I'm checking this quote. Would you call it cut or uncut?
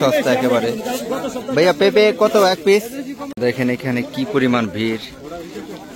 cut